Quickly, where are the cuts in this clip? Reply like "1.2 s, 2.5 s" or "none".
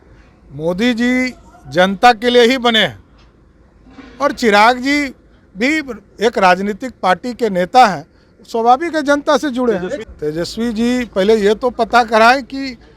10.0 s